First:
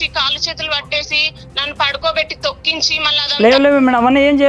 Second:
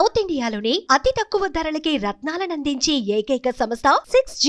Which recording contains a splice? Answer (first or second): first